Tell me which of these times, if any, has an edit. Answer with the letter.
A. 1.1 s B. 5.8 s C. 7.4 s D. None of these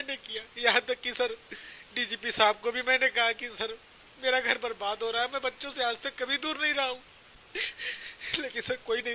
D